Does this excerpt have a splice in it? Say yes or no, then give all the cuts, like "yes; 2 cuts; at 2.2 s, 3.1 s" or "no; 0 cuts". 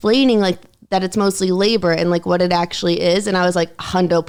no; 0 cuts